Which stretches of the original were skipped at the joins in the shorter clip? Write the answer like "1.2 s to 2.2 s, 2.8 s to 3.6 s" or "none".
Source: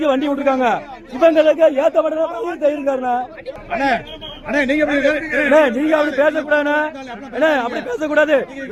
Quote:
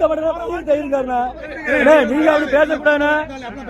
3.5 s to 5.2 s